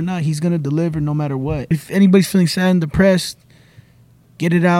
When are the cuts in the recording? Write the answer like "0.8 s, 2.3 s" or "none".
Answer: 1.8 s